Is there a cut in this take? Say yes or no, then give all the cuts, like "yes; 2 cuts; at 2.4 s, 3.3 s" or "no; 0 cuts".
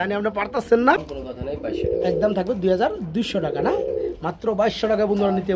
yes; 1 cut; at 1.1 s